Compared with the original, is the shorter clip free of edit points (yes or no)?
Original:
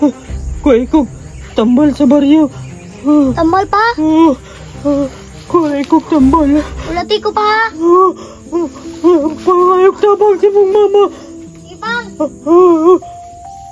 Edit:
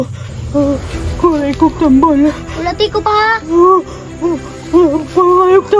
yes